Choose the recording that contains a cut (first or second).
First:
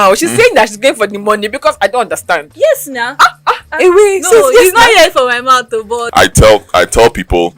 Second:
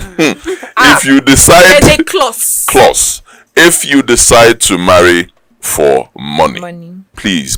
first